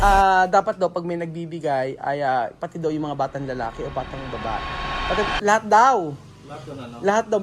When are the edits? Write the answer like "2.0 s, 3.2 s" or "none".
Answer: none